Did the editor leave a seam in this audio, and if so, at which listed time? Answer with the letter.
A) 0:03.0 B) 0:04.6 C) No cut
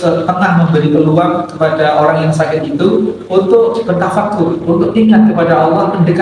B